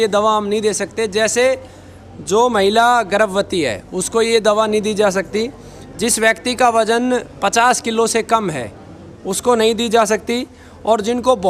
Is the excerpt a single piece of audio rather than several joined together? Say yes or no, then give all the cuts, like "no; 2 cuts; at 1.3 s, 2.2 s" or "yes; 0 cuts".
yes; 0 cuts